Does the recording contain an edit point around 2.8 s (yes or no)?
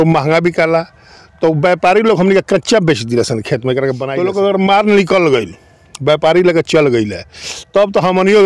no